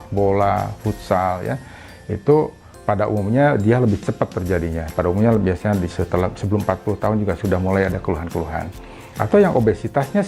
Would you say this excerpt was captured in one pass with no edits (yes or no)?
yes